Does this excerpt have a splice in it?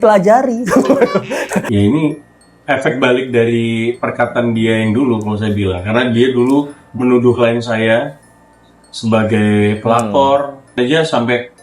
yes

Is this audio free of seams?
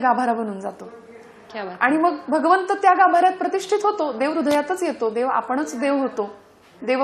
yes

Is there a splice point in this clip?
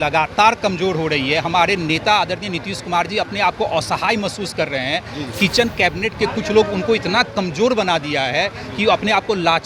no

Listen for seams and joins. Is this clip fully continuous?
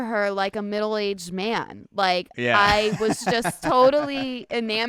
yes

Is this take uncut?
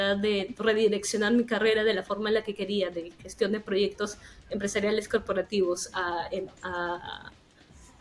yes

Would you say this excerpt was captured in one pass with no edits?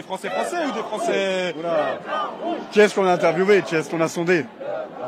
yes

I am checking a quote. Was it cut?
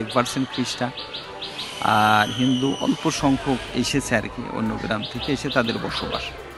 no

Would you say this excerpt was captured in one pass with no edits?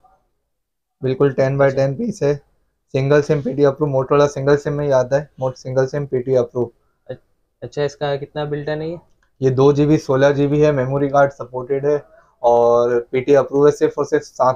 yes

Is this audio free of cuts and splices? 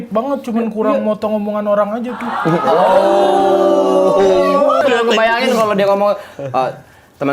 no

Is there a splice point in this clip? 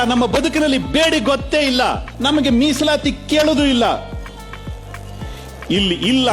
yes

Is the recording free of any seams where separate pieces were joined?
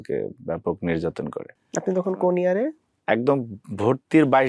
no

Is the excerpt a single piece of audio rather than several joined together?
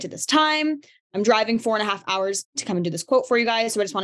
no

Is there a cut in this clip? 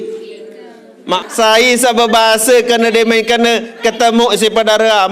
yes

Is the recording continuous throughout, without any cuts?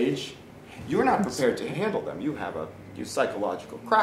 no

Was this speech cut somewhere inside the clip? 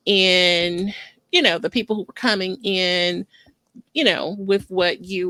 no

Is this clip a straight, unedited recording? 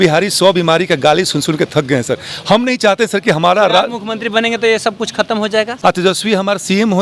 no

